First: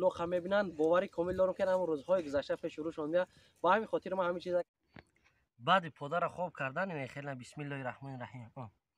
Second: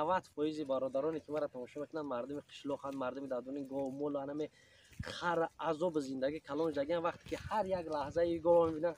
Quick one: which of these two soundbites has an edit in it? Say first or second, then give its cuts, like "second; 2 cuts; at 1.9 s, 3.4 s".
first; 1 cut; at 4.7 s